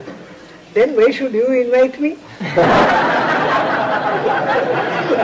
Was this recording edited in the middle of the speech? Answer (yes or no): yes